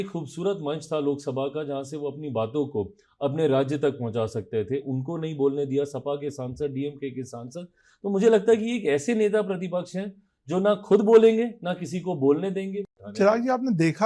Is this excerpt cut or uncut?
cut